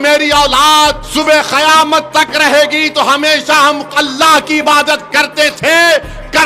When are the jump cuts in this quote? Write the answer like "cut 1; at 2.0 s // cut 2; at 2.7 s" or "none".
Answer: cut 1; at 1.0 s